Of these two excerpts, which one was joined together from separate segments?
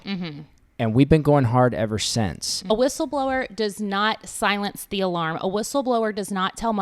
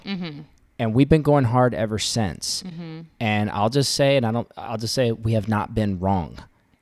first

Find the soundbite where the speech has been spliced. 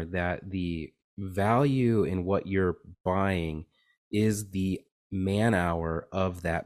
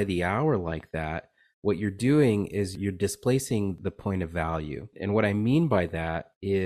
second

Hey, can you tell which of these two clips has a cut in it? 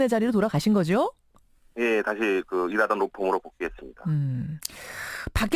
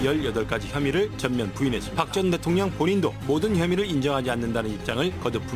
first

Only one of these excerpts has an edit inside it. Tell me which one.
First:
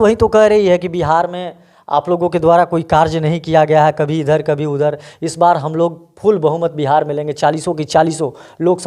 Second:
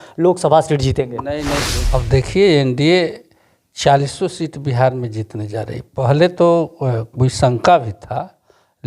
second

